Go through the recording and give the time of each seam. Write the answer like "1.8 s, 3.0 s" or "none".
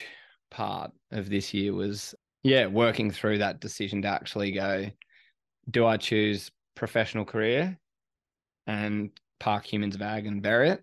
2.1 s